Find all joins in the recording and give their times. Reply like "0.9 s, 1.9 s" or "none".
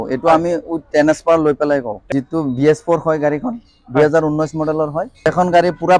2.1 s, 5.3 s